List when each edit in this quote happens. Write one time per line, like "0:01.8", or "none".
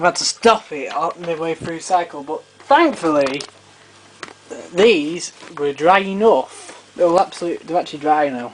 0:06.9